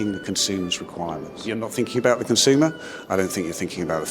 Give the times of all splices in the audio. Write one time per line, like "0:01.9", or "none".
0:01.4